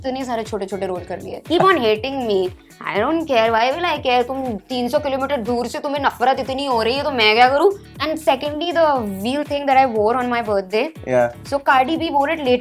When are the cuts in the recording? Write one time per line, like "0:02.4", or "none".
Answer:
0:01.4
0:07.9